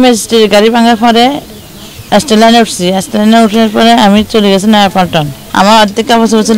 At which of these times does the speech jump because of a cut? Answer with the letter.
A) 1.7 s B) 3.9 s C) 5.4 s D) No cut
C